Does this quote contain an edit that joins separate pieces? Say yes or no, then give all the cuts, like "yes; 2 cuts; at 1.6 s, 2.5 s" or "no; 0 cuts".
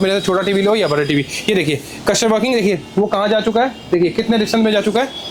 no; 0 cuts